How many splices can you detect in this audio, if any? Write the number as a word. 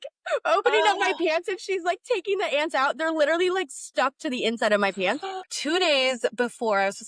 one